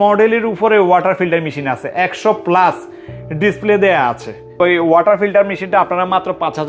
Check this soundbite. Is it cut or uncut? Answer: cut